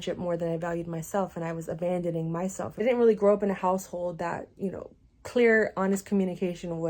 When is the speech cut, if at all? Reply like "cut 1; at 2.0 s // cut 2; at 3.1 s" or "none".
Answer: cut 1; at 2.8 s